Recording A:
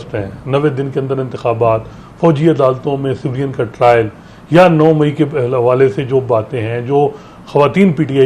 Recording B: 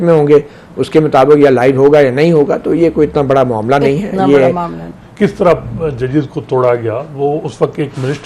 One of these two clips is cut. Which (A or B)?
B